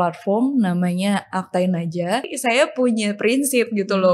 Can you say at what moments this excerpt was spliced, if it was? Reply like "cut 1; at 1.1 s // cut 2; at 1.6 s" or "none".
cut 1; at 2.3 s